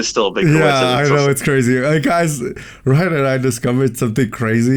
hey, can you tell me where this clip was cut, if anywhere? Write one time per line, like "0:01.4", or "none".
none